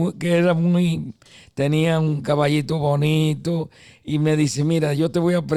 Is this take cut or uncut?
uncut